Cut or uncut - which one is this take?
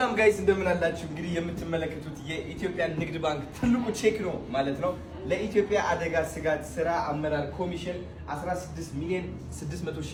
uncut